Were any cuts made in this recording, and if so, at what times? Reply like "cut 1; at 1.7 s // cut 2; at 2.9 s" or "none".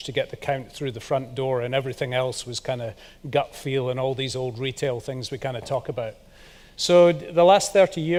none